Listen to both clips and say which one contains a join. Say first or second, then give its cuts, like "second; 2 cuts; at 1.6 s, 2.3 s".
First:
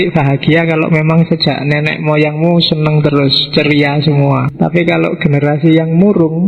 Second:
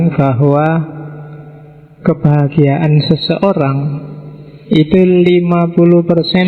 first; 1 cut; at 4.5 s